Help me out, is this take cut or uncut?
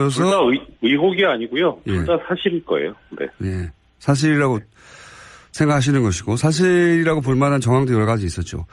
uncut